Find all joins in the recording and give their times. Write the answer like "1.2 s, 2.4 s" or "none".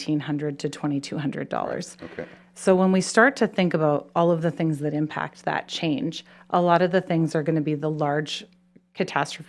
none